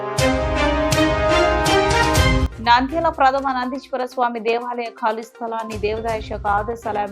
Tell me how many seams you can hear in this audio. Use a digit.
1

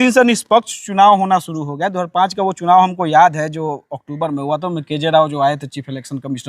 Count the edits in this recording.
0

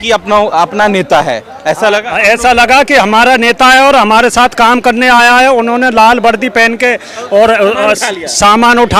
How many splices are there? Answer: 0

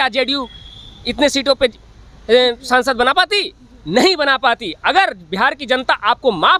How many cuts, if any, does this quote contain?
0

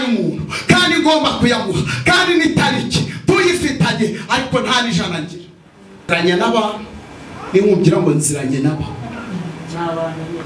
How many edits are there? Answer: 1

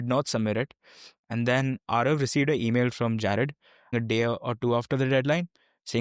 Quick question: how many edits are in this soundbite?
1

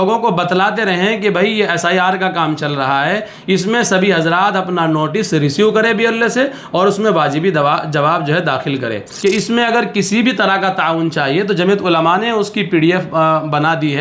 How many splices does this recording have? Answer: 1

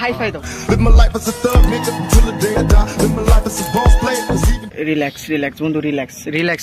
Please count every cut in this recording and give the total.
1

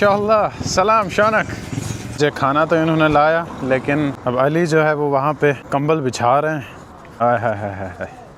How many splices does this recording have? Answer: 4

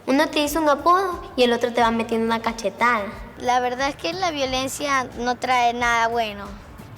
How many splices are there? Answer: 1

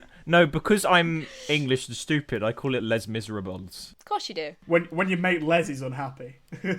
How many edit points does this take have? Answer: 1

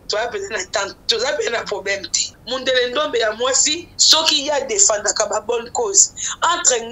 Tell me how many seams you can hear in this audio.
1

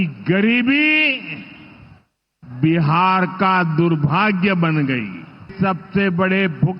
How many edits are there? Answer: 1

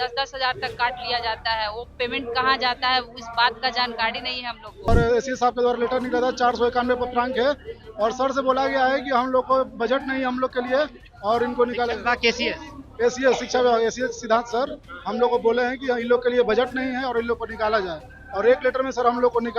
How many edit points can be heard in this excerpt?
1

